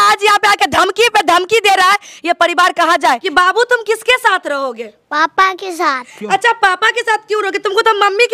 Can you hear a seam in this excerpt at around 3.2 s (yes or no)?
yes